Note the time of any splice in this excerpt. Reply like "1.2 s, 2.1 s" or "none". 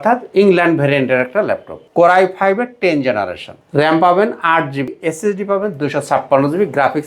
1.8 s, 3.6 s, 5.0 s